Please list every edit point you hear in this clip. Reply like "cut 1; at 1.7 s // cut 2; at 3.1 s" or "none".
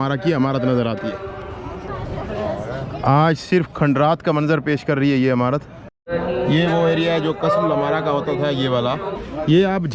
none